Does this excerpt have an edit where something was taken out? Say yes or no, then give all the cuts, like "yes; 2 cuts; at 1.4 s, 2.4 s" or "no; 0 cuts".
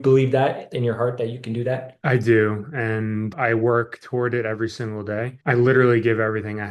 yes; 2 cuts; at 1.9 s, 3.3 s